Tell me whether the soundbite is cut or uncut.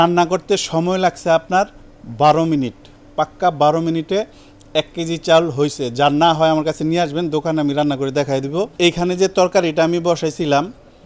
uncut